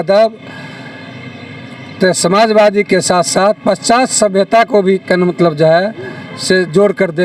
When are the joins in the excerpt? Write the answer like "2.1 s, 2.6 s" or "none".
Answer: none